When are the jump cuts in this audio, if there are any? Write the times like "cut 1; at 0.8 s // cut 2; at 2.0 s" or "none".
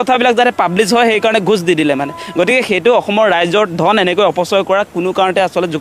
none